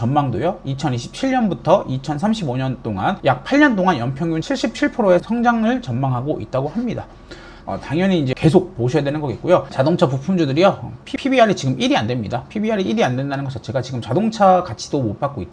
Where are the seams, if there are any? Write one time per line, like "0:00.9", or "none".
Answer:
0:07.5
0:09.7